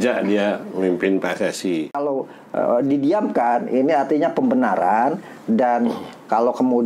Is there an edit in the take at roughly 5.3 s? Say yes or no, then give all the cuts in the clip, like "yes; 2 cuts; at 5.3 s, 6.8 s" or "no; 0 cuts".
no; 1 cut; at 2.0 s